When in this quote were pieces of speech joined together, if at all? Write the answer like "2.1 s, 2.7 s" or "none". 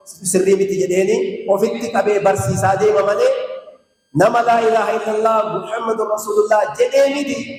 none